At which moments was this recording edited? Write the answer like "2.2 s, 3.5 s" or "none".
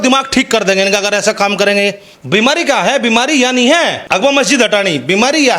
2.1 s, 4.0 s